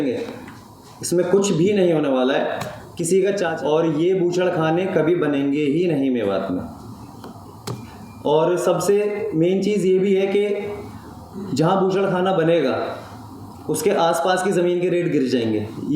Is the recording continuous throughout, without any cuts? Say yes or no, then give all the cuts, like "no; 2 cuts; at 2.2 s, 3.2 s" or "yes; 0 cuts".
no; 1 cut; at 3.6 s